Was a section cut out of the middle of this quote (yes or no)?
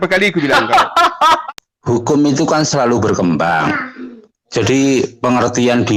yes